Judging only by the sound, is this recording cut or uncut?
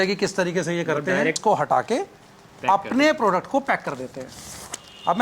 cut